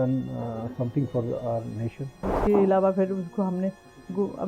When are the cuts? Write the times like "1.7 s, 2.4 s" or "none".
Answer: 2.2 s